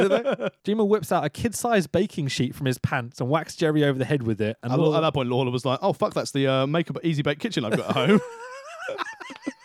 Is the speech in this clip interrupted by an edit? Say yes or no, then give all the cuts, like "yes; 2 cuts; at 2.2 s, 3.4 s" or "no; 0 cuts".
no; 0 cuts